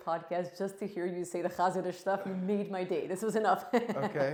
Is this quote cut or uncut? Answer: uncut